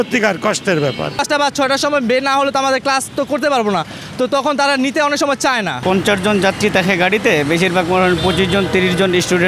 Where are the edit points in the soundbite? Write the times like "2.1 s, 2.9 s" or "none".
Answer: 1.2 s, 5.8 s